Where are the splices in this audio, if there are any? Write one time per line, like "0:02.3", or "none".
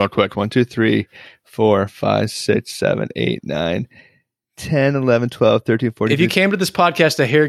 none